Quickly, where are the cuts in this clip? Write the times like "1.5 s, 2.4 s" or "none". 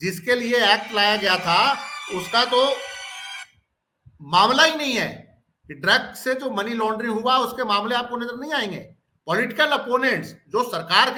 none